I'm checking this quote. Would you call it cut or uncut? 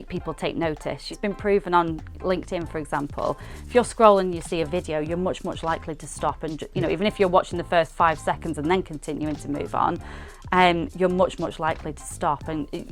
cut